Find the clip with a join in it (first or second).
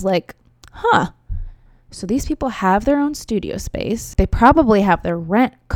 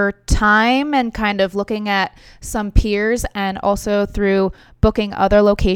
first